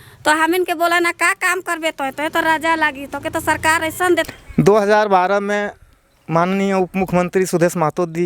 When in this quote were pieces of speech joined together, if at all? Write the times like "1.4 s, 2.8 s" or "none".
4.3 s